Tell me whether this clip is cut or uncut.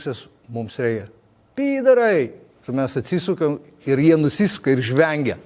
uncut